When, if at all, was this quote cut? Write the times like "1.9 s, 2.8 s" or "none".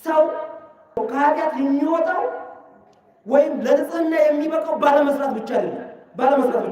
1.0 s